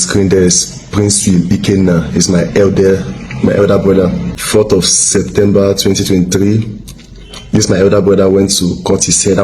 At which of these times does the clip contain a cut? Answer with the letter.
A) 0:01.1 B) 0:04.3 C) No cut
B